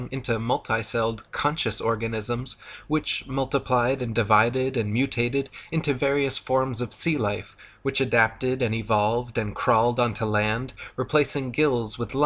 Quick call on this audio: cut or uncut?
cut